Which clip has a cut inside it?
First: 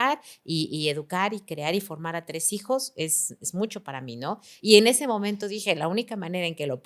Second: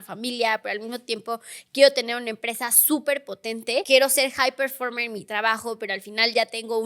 second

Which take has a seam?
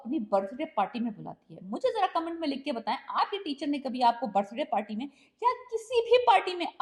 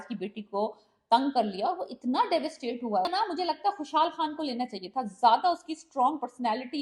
second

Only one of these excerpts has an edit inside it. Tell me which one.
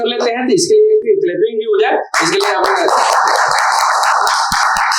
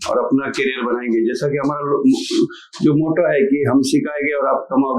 first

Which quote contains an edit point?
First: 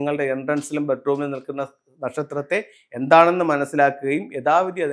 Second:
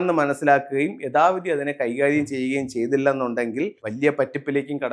second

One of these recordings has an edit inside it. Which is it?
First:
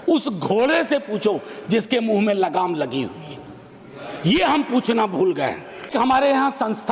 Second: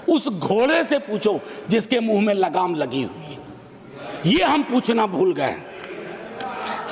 first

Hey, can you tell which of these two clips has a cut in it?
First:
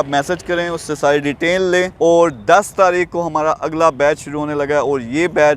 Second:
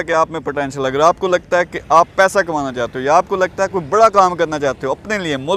first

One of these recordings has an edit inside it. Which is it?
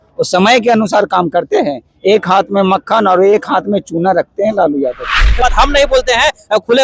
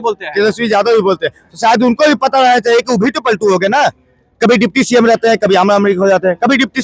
first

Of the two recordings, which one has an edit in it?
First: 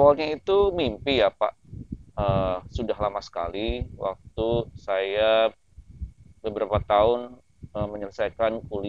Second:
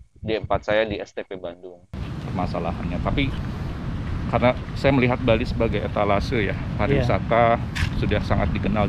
second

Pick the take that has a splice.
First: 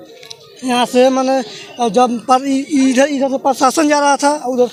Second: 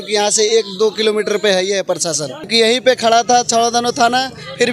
second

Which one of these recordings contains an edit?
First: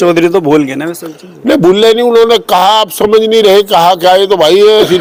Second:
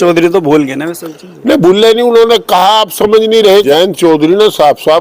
second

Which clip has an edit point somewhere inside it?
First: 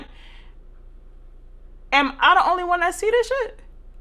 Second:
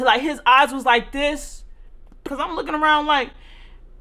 second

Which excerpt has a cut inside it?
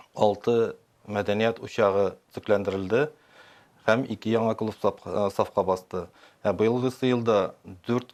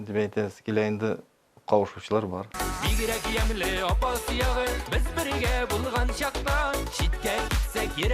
second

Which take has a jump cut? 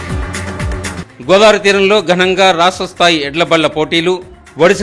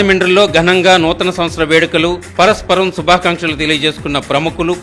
first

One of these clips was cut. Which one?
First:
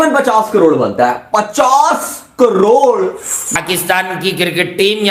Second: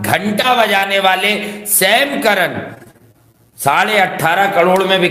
first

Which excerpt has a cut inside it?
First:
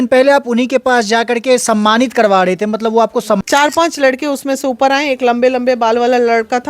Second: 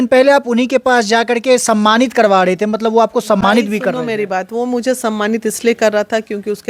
first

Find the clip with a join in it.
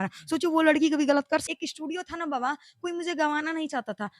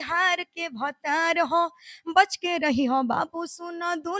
first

